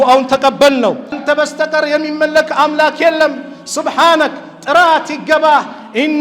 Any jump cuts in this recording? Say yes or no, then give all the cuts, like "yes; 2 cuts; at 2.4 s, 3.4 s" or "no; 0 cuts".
yes; 1 cut; at 1.2 s